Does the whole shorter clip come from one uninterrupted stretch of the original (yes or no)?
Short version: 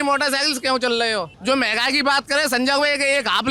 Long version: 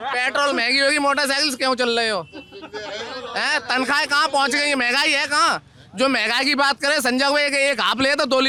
no